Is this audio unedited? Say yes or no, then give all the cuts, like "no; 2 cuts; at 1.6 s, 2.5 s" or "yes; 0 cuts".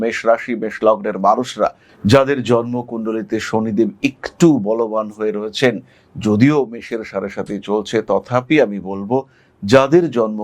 no; 1 cut; at 1.9 s